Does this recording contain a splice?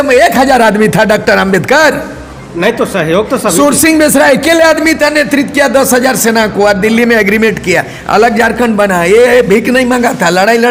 no; 0 cuts

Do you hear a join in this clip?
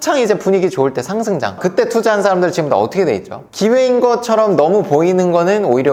no; 0 cuts

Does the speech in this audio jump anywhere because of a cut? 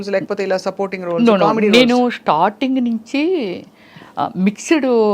no; 0 cuts

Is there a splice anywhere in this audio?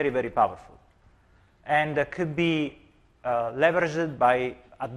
no; 0 cuts

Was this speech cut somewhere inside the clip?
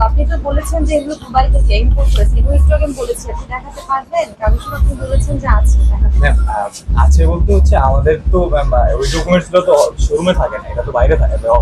no; 0 cuts

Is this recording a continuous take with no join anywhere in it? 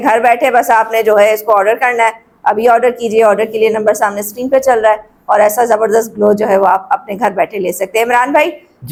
yes; 0 cuts

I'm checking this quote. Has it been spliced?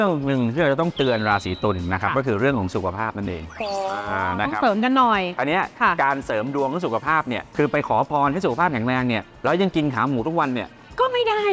no; 0 cuts

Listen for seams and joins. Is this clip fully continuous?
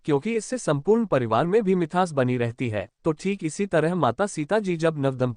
yes; 0 cuts

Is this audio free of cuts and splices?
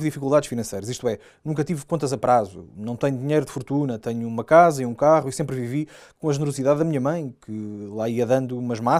yes; 0 cuts

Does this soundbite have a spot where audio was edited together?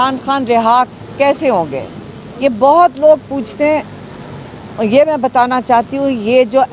no; 0 cuts

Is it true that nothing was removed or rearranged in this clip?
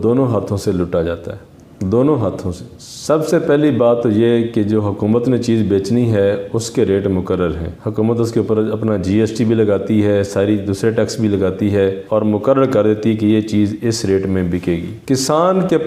yes; 0 cuts

